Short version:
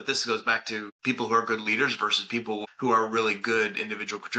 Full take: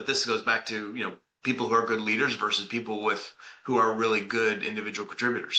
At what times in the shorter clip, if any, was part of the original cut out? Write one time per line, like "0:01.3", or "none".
0:00.9
0:02.6